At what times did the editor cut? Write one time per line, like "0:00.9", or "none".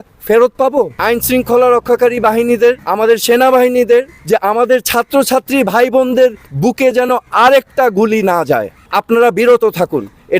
0:01.0
0:02.8
0:04.2
0:08.8

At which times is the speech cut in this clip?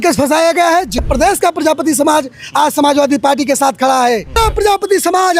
0:01.0
0:04.4

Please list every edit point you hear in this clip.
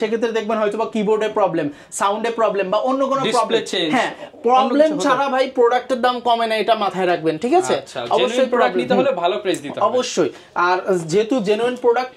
none

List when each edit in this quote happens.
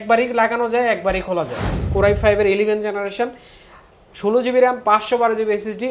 0:01.8

